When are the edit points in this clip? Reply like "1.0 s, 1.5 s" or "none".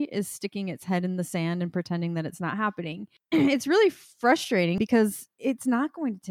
3.1 s, 4.8 s